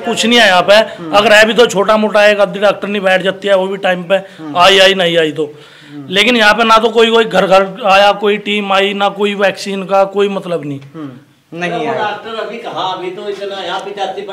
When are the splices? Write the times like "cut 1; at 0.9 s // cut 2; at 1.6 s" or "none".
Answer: none